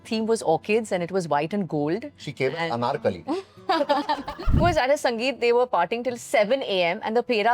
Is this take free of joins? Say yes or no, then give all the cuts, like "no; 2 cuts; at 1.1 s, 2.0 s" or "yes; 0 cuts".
no; 1 cut; at 4.6 s